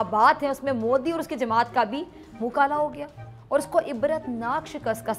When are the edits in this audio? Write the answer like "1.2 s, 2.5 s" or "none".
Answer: none

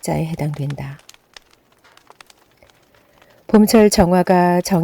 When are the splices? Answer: 1.0 s, 3.4 s

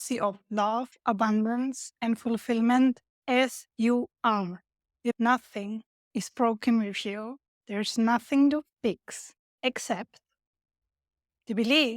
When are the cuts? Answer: 5.1 s

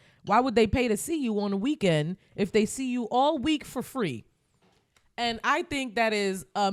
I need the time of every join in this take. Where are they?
none

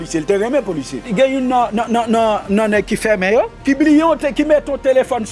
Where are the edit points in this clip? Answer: 1.1 s, 3.5 s

